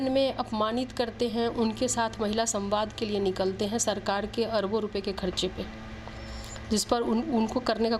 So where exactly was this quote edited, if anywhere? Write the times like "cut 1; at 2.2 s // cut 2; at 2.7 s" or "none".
none

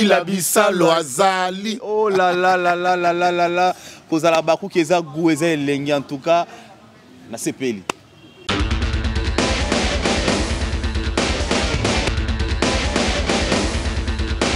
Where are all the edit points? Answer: none

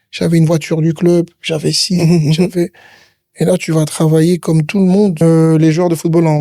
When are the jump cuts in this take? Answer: cut 1; at 5.2 s

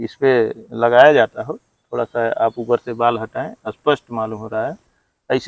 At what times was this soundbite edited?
none

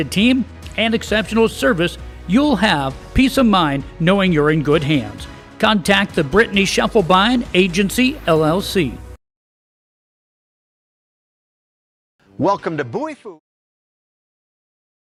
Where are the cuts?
none

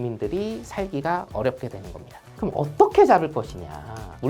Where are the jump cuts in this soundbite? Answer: cut 1; at 2.3 s

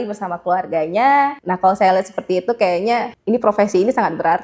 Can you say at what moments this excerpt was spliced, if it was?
cut 1; at 1.4 s // cut 2; at 3.1 s

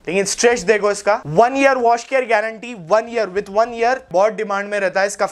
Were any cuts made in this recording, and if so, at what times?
cut 1; at 1.2 s // cut 2; at 4.1 s

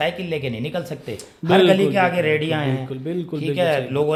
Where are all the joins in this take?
none

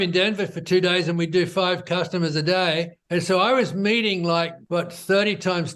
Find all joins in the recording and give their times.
cut 1; at 3.0 s // cut 2; at 4.6 s

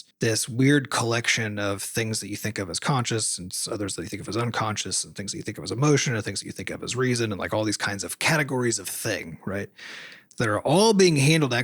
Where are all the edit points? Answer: none

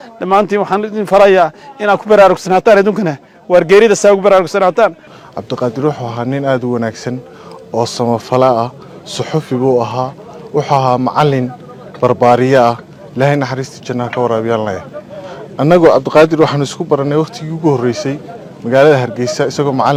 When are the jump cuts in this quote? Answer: none

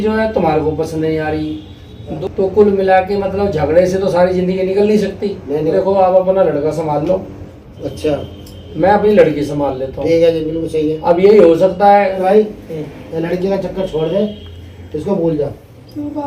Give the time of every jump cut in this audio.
cut 1; at 2.2 s // cut 2; at 5.7 s // cut 3; at 12.2 s

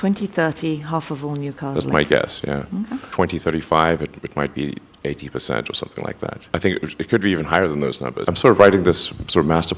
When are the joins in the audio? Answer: cut 1; at 6.4 s // cut 2; at 8.3 s

